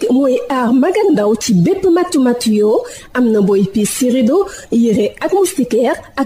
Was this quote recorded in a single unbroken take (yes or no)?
yes